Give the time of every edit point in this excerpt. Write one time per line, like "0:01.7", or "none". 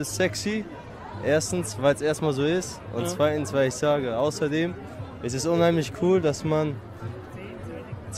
none

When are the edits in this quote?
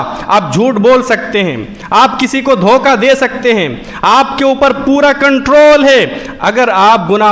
none

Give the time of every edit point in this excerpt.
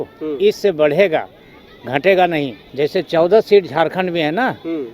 0:02.6

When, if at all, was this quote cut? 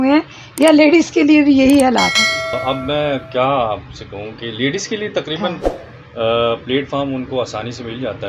0:02.6

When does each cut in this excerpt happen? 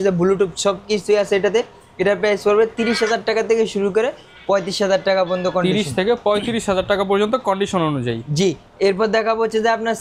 none

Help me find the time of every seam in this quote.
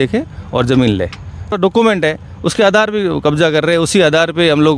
0:01.5

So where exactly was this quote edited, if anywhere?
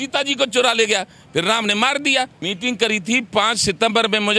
0:02.4

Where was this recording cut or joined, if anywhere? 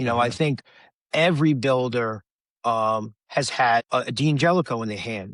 0:03.9

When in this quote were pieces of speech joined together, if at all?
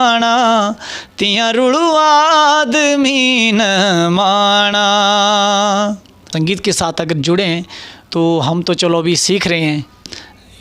0:06.2

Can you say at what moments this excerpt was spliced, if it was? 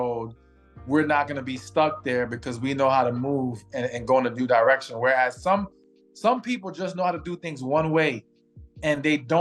none

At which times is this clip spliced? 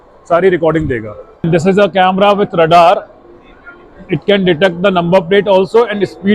0:01.5

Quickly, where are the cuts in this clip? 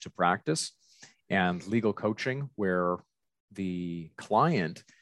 none

